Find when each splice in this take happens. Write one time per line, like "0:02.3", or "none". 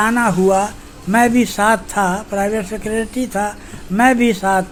none